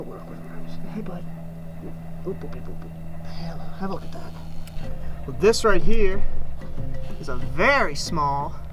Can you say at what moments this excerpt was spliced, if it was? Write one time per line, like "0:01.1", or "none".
none